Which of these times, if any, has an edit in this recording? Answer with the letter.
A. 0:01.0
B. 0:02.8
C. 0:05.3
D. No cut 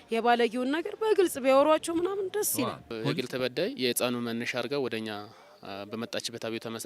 B